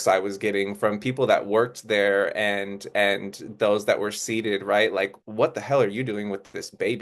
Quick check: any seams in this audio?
yes; 1 cut; at 5.2 s

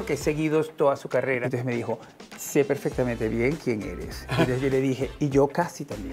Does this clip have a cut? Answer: yes; 1 cut; at 1.4 s

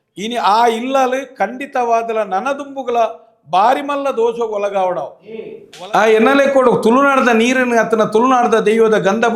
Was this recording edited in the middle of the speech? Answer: yes; 1 cut; at 5.6 s

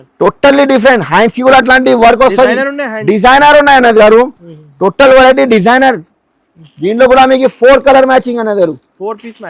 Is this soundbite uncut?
yes; 0 cuts

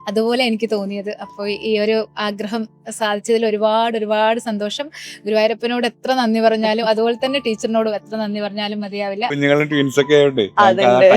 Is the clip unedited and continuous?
no; 1 cut; at 9.3 s

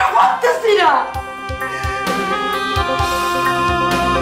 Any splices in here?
no; 0 cuts

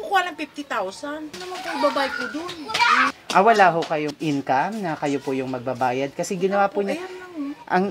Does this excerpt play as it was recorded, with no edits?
no; 3 cuts; at 1.4 s, 3.1 s, 4.1 s

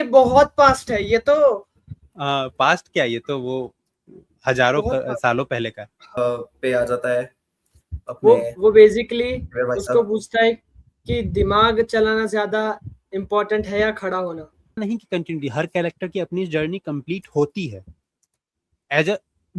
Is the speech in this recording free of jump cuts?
no; 2 cuts; at 6.2 s, 14.8 s

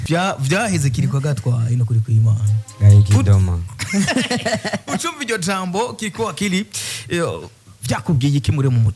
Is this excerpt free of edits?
yes; 0 cuts

